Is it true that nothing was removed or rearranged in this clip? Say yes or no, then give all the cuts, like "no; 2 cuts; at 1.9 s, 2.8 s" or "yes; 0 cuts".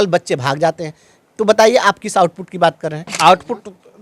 no; 1 cut; at 3.1 s